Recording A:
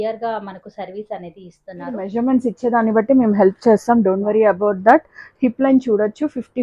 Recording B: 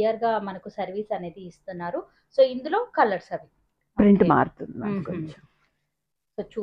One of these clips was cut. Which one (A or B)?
A